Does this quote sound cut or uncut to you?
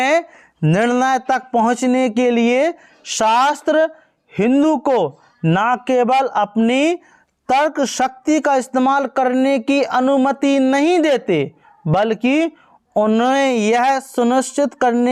uncut